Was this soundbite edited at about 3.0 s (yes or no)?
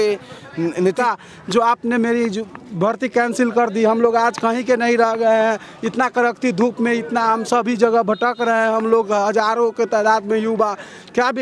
no